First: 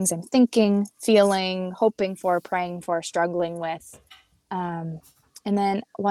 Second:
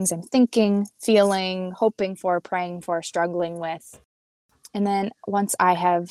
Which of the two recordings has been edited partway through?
second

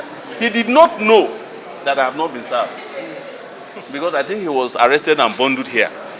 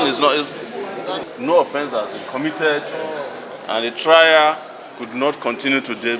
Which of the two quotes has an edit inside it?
second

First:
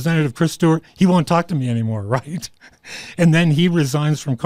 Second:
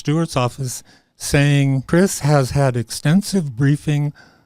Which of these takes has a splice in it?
second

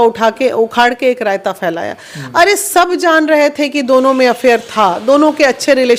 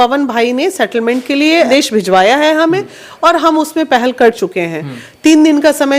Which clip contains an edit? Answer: second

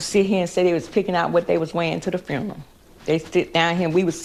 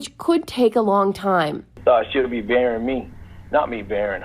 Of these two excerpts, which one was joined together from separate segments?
second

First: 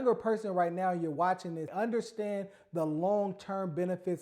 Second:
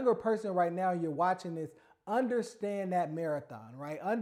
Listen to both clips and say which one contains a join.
first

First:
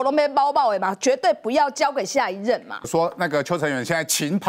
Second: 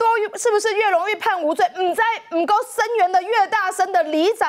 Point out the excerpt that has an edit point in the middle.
first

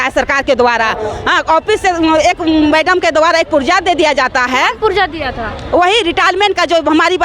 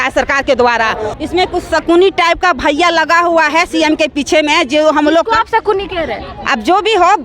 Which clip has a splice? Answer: second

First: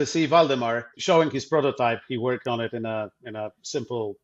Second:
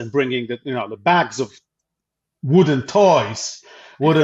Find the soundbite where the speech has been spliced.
first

